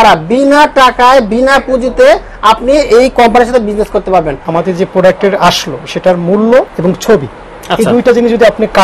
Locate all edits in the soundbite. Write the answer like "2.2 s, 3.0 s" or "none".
4.4 s, 6.7 s